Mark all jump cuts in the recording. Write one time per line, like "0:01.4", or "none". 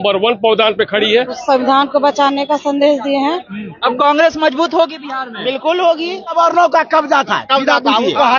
0:01.4
0:03.7
0:06.3

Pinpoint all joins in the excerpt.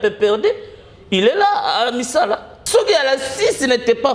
0:02.5

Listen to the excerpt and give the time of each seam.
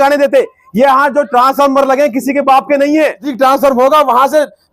0:03.3

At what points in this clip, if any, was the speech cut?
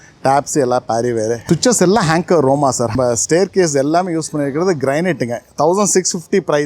0:01.4
0:02.9

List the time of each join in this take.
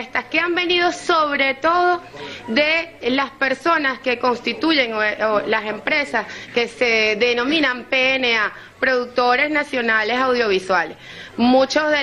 0:09.9

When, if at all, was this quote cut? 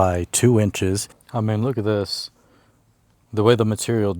0:01.2

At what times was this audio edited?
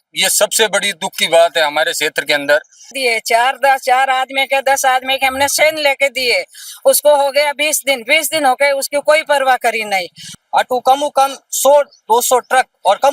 0:03.0
0:10.3

